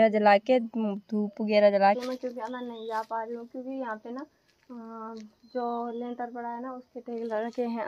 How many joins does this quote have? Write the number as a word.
one